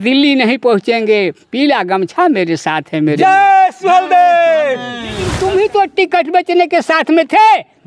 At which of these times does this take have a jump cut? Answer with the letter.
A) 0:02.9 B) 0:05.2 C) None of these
B